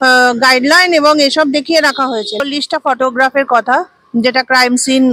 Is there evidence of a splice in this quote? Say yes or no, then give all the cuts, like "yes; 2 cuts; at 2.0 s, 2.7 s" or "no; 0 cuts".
yes; 1 cut; at 2.4 s